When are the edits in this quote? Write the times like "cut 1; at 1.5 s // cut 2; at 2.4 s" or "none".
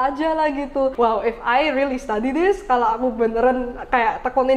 cut 1; at 0.9 s